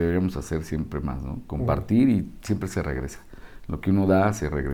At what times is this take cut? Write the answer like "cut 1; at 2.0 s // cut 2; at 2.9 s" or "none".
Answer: none